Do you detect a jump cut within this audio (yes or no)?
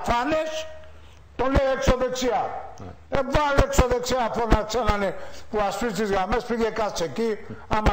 yes